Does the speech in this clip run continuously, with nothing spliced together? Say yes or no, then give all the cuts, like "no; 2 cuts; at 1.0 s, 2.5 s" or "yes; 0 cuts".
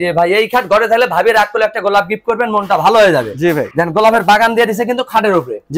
yes; 0 cuts